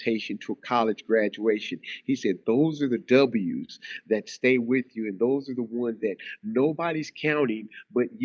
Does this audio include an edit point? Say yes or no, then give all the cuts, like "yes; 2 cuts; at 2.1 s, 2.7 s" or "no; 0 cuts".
no; 0 cuts